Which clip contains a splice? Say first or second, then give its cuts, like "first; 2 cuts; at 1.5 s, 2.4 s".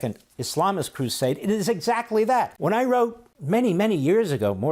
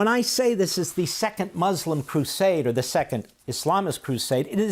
first; 2 cuts; at 2.5 s, 3.3 s